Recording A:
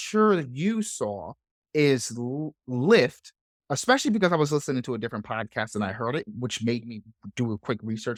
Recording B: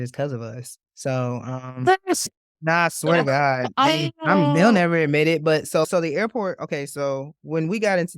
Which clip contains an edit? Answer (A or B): B